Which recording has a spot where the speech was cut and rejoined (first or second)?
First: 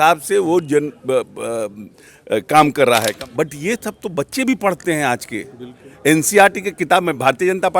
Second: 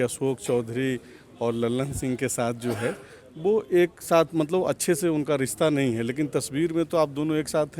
first